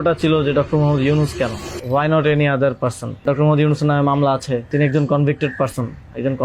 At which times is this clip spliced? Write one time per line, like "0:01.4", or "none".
0:01.7
0:03.2
0:04.7